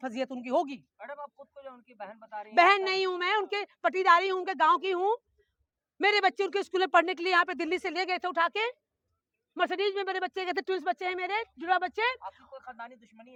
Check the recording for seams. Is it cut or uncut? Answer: uncut